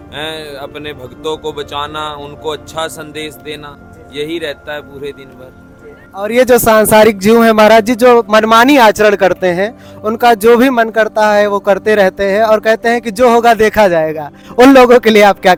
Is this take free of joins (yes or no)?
yes